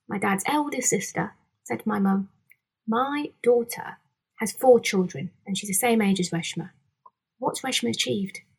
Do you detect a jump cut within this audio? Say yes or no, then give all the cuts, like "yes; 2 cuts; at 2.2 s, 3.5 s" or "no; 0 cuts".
no; 0 cuts